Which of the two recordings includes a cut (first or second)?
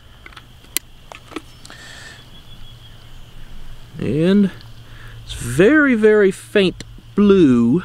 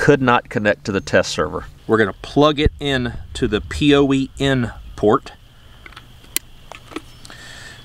second